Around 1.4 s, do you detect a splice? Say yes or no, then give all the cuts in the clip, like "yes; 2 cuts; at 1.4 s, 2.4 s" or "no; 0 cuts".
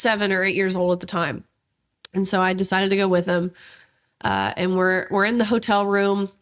no; 0 cuts